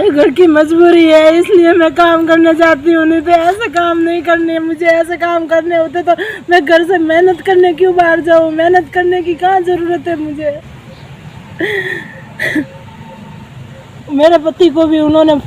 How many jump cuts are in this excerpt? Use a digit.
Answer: 1